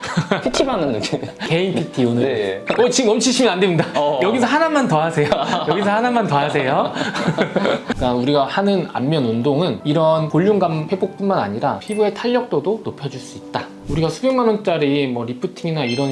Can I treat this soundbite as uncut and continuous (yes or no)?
no